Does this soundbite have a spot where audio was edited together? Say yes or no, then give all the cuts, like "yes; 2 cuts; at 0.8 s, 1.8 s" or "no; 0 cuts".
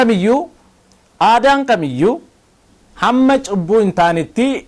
no; 0 cuts